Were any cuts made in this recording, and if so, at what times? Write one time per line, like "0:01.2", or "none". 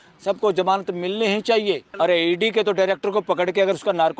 0:01.9